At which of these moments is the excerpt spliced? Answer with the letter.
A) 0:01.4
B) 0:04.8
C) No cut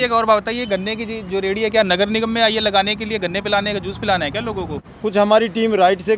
B